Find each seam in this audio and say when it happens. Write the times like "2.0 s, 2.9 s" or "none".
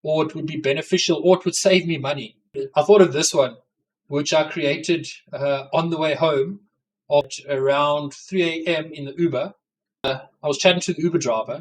2.6 s, 7.3 s, 10.2 s